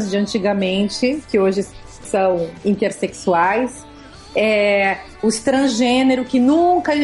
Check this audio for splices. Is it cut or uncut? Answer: uncut